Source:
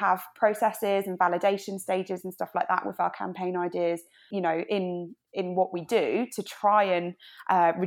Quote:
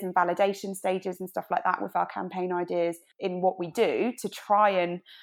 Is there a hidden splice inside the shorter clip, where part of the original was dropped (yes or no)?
yes